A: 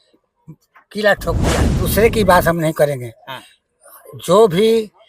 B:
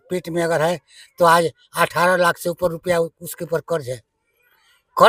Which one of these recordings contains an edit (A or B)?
A